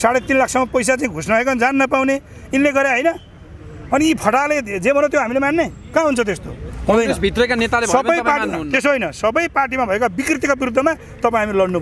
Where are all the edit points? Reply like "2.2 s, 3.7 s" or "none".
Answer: none